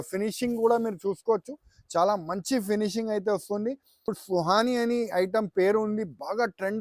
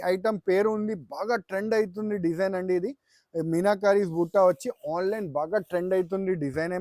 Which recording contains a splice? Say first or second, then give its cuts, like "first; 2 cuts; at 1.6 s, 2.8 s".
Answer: first; 1 cut; at 4.1 s